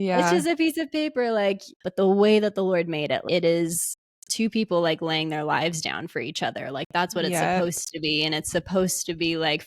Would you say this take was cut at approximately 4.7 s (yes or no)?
no